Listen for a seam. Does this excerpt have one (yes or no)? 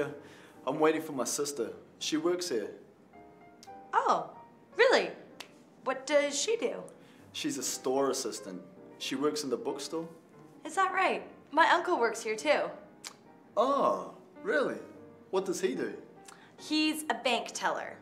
no